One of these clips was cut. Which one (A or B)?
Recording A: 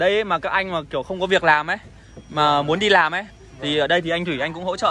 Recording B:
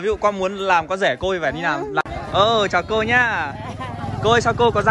B